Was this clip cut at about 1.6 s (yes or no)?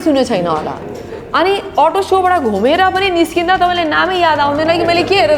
no